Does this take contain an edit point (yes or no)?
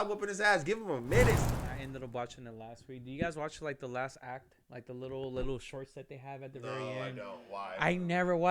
yes